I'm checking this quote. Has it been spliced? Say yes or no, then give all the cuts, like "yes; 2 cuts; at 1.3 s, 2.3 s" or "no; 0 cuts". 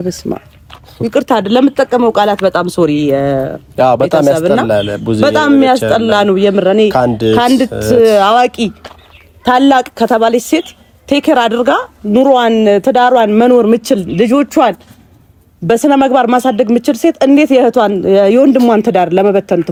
no; 0 cuts